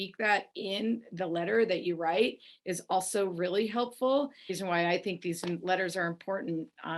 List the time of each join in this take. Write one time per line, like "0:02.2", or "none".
0:04.5